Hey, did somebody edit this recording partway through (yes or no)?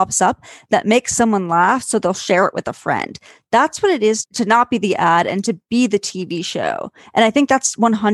no